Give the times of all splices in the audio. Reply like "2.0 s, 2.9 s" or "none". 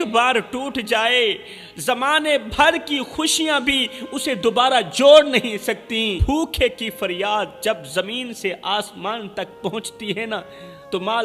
6.2 s